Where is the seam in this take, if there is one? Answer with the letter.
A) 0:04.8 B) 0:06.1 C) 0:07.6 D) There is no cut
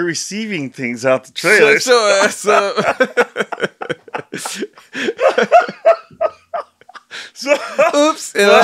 D